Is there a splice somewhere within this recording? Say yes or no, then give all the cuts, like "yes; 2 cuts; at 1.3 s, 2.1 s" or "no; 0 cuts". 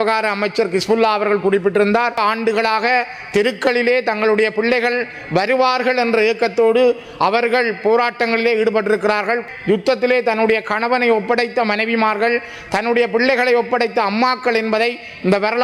yes; 2 cuts; at 2.2 s, 9.5 s